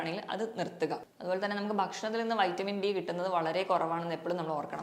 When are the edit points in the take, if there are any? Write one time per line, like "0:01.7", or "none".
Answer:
0:01.1